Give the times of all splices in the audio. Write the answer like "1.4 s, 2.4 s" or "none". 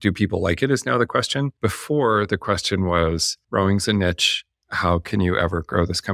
1.5 s, 3.3 s